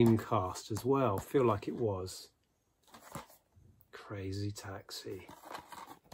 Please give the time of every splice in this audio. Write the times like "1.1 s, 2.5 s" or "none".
none